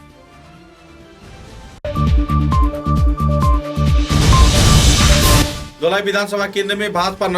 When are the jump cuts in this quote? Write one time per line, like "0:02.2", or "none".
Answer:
0:05.4